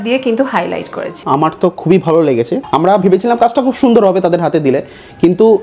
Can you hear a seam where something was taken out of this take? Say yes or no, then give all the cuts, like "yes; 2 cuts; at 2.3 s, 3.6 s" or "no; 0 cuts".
yes; 2 cuts; at 1.1 s, 2.5 s